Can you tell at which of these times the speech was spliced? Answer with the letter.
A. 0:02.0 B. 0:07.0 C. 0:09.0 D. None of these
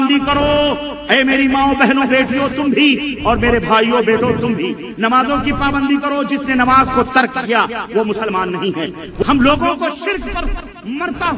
C